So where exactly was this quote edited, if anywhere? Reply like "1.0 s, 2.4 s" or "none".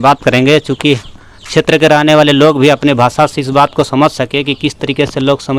none